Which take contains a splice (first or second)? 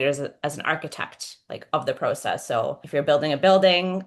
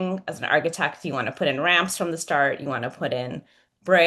first